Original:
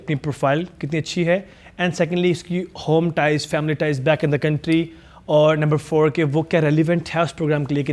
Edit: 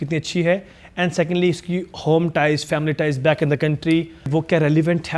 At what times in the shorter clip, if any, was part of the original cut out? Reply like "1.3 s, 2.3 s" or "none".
4.3 s